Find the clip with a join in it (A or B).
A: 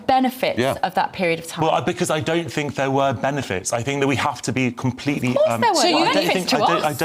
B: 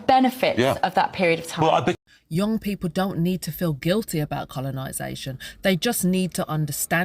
A